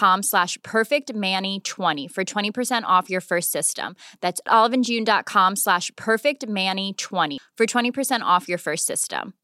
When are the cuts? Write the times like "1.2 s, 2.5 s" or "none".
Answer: 2.0 s